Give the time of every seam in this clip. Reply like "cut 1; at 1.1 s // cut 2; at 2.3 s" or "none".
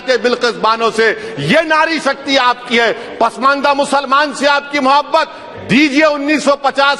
none